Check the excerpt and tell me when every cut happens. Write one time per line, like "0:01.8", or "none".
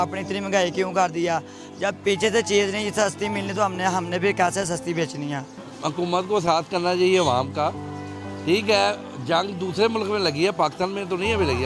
0:05.7